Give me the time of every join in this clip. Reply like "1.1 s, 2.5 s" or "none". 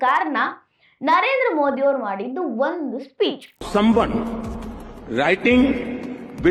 3.6 s